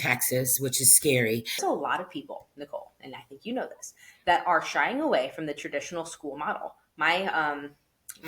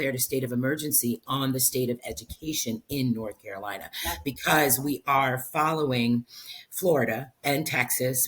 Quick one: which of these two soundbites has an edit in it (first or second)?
first